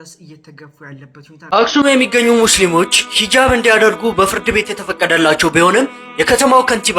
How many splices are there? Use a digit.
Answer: 1